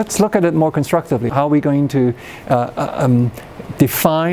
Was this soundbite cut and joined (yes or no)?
yes